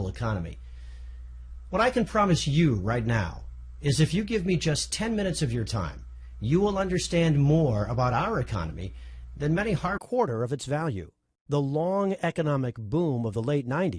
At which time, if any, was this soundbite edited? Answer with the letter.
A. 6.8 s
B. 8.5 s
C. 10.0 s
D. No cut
D